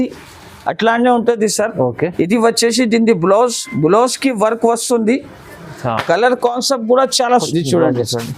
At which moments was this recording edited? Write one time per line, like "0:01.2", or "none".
0:07.5